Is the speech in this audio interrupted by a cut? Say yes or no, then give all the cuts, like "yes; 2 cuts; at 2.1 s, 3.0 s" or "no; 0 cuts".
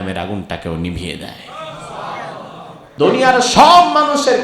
yes; 1 cut; at 2.8 s